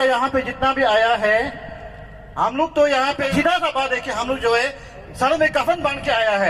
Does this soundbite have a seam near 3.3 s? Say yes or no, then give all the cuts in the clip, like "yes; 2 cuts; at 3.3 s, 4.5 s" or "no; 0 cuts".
yes; 1 cut; at 3.3 s